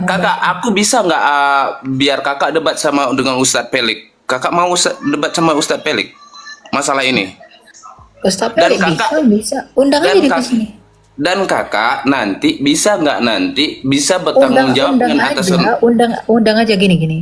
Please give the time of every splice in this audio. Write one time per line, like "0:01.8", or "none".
none